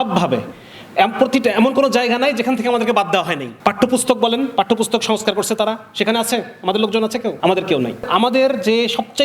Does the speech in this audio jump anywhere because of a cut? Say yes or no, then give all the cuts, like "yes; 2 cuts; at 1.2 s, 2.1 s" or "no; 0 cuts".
yes; 2 cuts; at 7.4 s, 8.0 s